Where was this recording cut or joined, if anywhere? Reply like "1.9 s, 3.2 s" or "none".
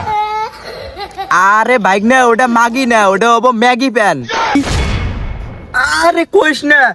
4.6 s